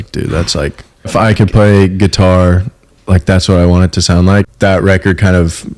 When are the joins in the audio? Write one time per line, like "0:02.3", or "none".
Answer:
0:01.1
0:04.4